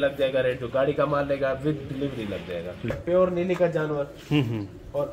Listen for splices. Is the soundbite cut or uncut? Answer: cut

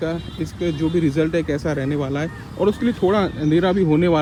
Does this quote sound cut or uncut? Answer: uncut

